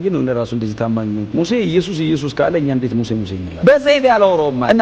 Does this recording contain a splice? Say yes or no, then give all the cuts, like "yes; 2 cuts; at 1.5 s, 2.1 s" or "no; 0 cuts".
yes; 1 cut; at 3.6 s